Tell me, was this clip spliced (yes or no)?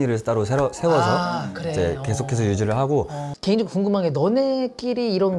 yes